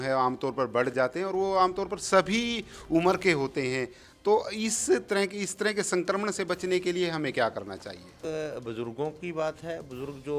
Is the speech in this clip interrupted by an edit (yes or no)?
yes